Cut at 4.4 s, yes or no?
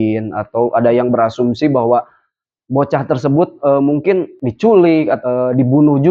yes